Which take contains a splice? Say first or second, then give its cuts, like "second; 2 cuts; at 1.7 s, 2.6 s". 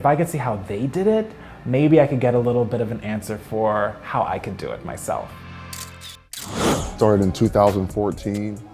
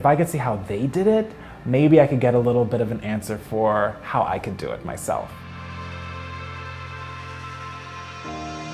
first; 1 cut; at 6.6 s